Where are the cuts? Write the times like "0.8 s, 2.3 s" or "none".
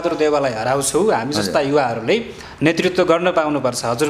none